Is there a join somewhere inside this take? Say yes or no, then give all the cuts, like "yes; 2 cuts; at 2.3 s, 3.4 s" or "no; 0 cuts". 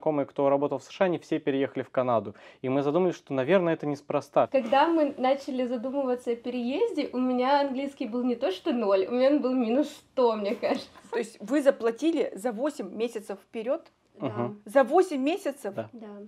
yes; 2 cuts; at 4.5 s, 10.9 s